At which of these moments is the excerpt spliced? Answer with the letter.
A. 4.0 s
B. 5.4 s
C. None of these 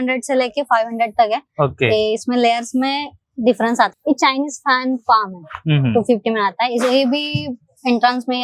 A